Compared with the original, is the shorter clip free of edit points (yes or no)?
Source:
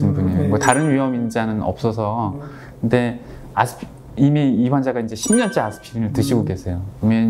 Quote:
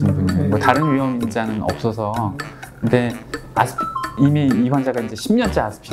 yes